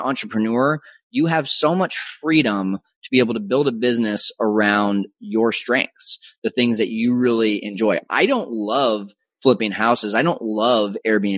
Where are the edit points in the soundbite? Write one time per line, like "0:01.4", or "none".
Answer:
none